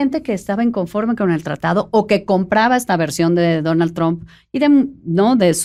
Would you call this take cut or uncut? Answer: uncut